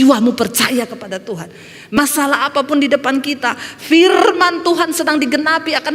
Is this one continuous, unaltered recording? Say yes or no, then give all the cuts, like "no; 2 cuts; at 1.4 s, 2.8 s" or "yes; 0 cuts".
no; 1 cut; at 2.0 s